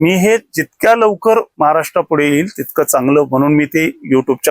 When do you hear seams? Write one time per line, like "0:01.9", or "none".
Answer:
0:01.5